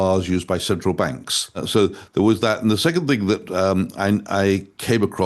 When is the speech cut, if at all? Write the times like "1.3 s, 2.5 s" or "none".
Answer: 1.6 s